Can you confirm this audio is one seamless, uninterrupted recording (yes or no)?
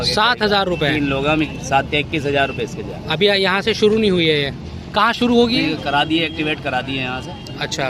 yes